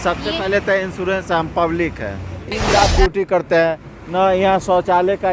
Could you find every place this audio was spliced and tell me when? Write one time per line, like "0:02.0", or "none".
0:02.5